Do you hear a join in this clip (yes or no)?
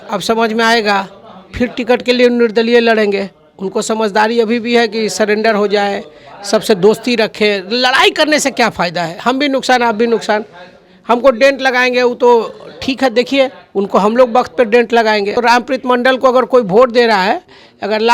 yes